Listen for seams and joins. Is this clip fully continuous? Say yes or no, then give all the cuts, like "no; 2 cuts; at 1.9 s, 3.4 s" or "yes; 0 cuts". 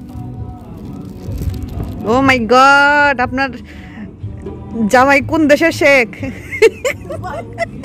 no; 1 cut; at 1.2 s